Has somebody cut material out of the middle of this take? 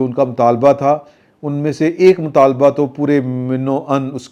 no; 0 cuts

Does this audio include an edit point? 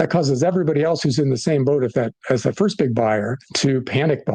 yes; 1 cut; at 3.4 s

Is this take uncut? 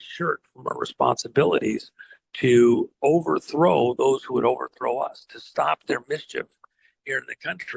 yes; 0 cuts

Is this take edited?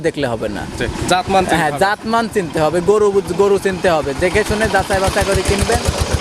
no; 0 cuts

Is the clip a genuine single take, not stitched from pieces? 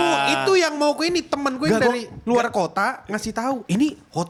yes; 0 cuts

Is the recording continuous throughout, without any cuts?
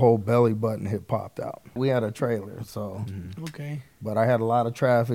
no; 1 cut; at 1.8 s

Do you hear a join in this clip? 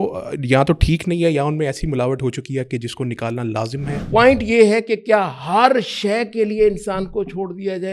yes; 1 cut; at 4.0 s

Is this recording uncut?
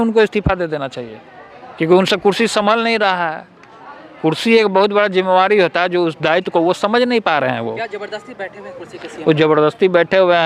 yes; 0 cuts

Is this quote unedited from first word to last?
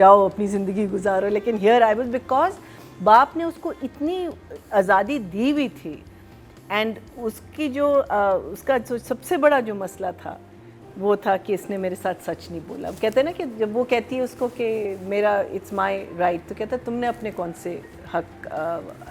yes; 0 cuts

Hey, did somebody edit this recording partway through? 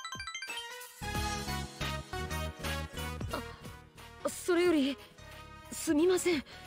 yes; 1 cut; at 2.1 s

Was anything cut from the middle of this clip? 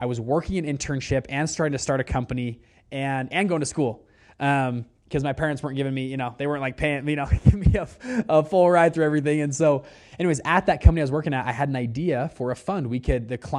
no; 0 cuts

